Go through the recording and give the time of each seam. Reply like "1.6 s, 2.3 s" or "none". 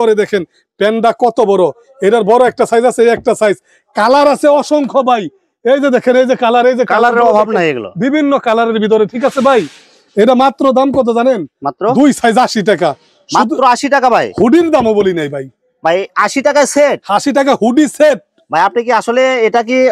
none